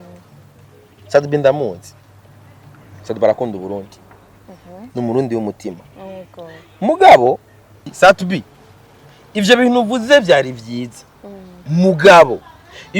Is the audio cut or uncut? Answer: cut